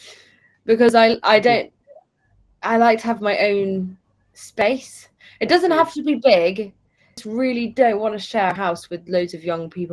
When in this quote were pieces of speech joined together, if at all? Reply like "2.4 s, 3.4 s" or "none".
7.3 s